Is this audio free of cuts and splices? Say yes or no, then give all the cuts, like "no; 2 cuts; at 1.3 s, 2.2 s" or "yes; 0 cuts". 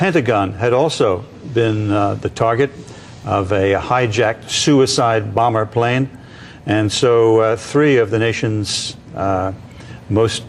no; 1 cut; at 8.5 s